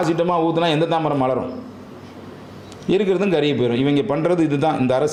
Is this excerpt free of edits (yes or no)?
yes